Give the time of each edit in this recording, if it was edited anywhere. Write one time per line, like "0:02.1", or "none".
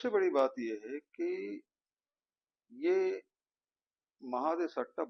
none